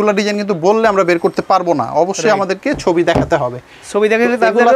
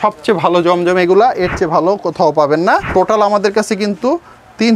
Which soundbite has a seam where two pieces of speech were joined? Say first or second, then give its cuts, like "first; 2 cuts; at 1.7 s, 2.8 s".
second; 1 cut; at 2.9 s